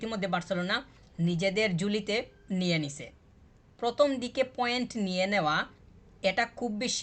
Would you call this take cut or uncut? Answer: uncut